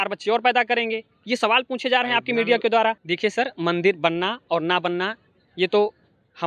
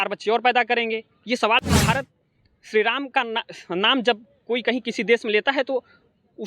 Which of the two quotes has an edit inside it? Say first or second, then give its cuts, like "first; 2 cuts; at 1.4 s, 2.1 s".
second; 1 cut; at 1.7 s